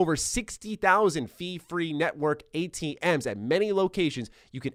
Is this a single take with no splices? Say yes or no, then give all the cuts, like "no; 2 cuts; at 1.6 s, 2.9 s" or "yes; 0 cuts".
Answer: yes; 0 cuts